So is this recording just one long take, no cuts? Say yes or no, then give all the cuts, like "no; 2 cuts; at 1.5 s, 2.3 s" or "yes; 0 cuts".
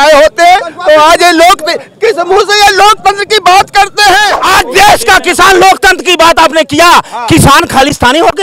no; 1 cut; at 4.4 s